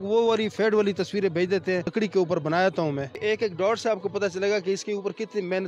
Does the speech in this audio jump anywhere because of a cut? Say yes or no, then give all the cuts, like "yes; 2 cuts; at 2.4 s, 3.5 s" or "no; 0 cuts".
yes; 2 cuts; at 1.9 s, 3.2 s